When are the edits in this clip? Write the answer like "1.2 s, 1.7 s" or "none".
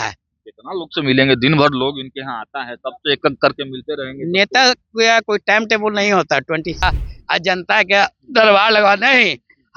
6.8 s